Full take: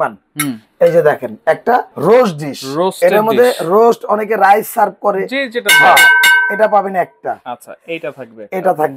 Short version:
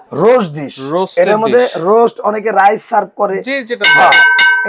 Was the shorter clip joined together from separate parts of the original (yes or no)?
no